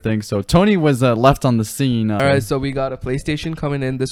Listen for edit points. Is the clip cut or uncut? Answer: cut